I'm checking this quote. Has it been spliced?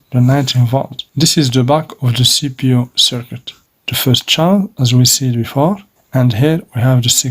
yes; 3 cuts; at 1.0 s, 3.6 s, 5.9 s

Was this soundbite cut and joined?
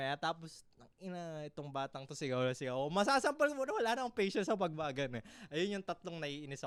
no; 0 cuts

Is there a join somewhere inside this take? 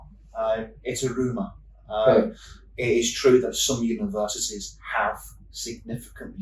no; 0 cuts

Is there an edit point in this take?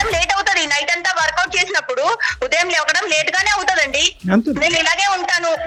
no; 0 cuts

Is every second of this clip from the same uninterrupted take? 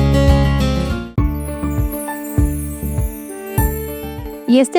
no; 1 cut; at 1.1 s

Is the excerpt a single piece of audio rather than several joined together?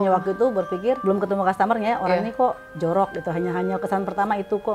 no; 1 cut; at 1.0 s

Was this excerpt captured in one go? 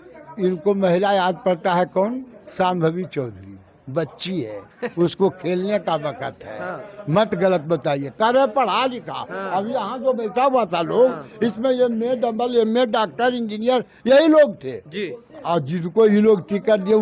yes; 0 cuts

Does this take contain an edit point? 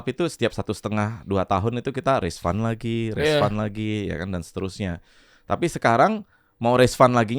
no; 0 cuts

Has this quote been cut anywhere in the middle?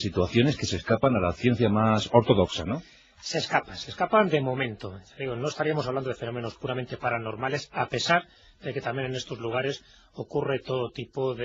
no; 0 cuts

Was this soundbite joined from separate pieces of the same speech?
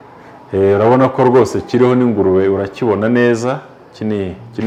no; 0 cuts

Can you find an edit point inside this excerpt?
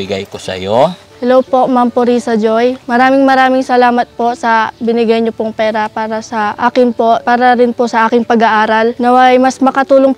yes; 4 cuts; at 1.1 s, 6.6 s, 7.2 s, 9.0 s

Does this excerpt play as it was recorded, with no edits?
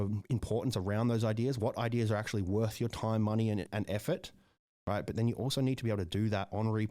no; 1 cut; at 3.7 s

